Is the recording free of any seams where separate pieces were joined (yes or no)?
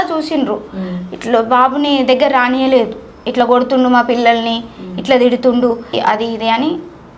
no